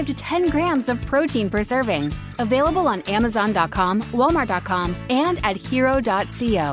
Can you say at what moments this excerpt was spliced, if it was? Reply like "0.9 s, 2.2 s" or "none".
none